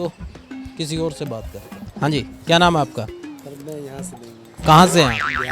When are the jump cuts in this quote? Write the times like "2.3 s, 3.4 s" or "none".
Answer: 1.8 s